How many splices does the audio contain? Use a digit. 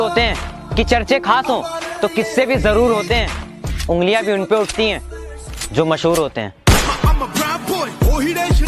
0